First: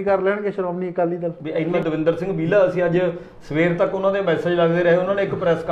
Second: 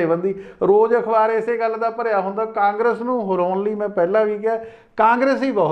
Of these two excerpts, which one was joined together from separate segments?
first; 1 cut; at 1.8 s

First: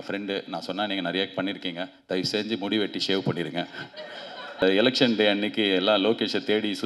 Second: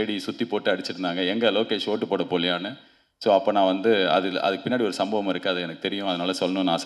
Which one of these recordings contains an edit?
first; 1 cut; at 4.6 s

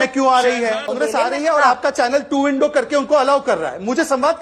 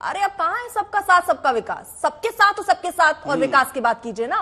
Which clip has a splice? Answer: first; 1 cut; at 0.9 s

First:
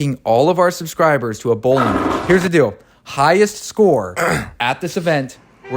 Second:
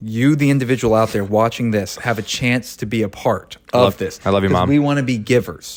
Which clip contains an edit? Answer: first; 1 cut; at 2.1 s

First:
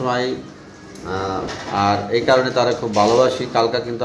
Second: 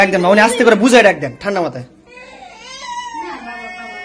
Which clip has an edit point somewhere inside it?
first; 1 cut; at 1.5 s

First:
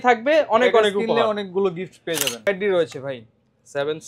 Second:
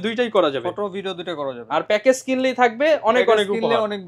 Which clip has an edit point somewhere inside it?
first; 1 cut; at 2.5 s

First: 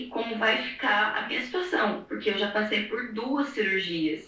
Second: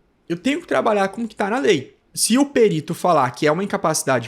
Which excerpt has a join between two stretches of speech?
second; 1 cut; at 2.1 s

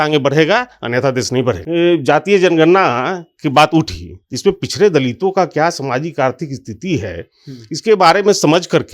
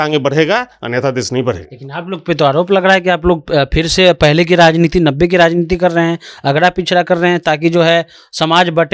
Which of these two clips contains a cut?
first; 1 cut; at 1.6 s

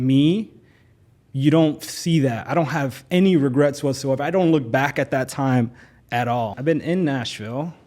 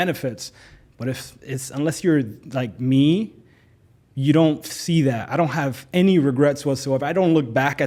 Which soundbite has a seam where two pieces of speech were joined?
first; 1 cut; at 6.6 s

